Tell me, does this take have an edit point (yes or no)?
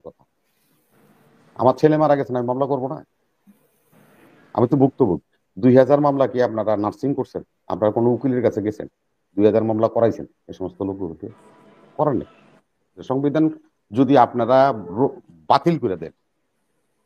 yes